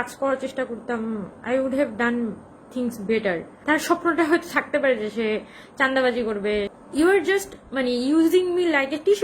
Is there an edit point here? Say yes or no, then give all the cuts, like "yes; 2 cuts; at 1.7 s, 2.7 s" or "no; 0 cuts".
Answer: yes; 2 cuts; at 3.5 s, 6.7 s